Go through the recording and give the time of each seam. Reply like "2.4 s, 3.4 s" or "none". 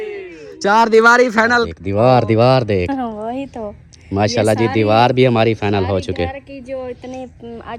1.8 s